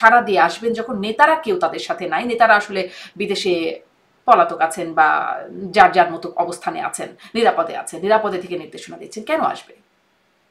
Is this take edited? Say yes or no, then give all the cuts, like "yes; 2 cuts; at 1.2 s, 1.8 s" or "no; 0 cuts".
no; 0 cuts